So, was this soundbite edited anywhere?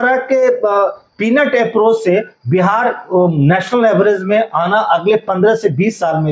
no; 0 cuts

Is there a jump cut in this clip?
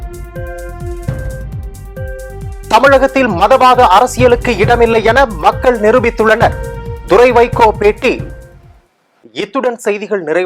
no; 0 cuts

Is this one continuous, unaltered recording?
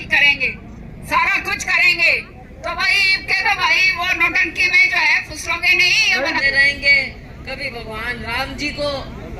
no; 1 cut; at 6.4 s

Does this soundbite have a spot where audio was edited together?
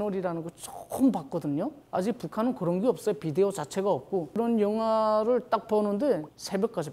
yes; 1 cut; at 4.3 s

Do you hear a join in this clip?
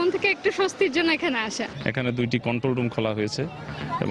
yes; 1 cut; at 1.7 s

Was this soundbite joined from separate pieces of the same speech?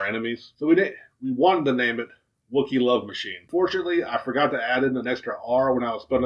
yes; 1 cut; at 3.5 s

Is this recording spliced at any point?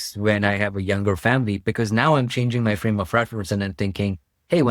no; 0 cuts

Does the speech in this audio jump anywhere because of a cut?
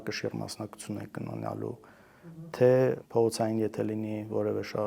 yes; 1 cut; at 3.0 s

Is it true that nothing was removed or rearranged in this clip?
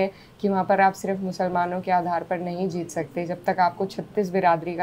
yes; 0 cuts

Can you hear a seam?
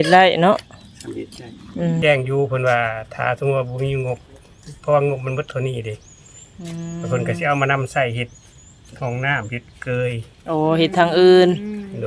yes; 1 cut; at 2.0 s

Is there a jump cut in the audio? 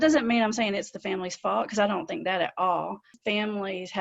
yes; 1 cut; at 3.1 s

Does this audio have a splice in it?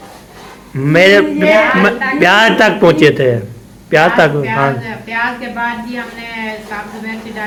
no; 0 cuts

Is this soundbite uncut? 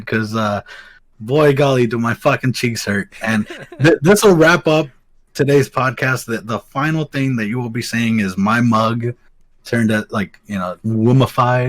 no; 1 cut; at 10.8 s

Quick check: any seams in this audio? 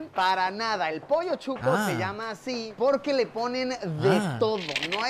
yes; 1 cut; at 2.9 s

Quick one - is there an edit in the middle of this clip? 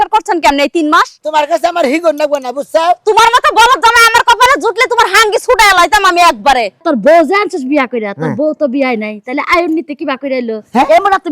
yes; 2 cuts; at 1.2 s, 6.8 s

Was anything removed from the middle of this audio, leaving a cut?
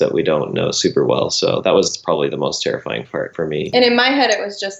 yes; 1 cut; at 3.6 s

